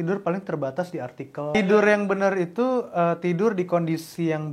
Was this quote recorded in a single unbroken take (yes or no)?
no